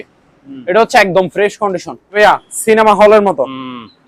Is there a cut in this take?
yes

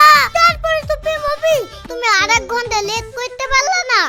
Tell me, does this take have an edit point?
yes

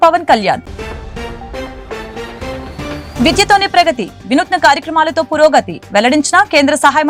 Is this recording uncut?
yes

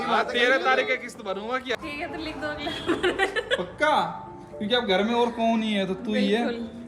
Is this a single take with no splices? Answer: no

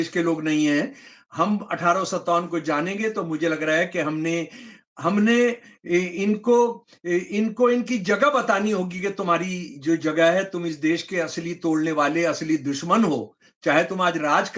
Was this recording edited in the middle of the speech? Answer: no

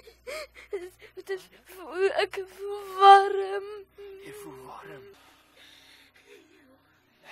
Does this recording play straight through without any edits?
no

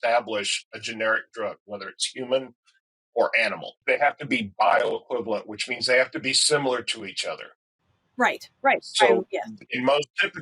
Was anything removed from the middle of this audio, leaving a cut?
yes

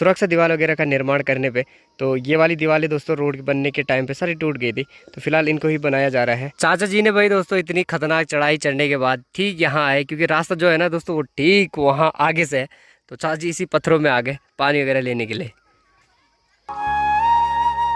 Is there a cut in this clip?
no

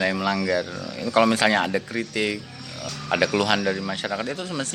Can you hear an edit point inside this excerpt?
yes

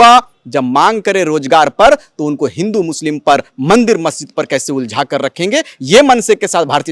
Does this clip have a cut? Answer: no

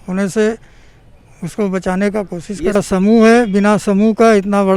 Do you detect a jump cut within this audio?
yes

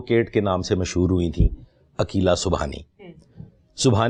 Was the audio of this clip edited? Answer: no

